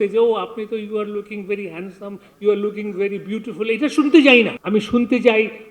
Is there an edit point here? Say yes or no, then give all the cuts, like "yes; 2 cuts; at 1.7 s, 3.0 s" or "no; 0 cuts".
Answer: yes; 1 cut; at 4.6 s